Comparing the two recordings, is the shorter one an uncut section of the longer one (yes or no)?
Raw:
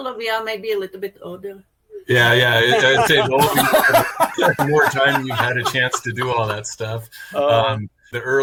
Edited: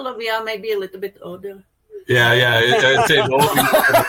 yes